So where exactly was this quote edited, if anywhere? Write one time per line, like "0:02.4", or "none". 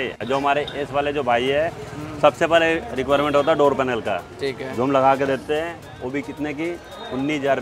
none